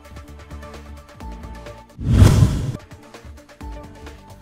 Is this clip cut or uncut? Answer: uncut